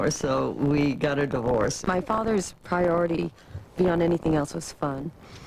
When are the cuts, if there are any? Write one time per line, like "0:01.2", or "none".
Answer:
none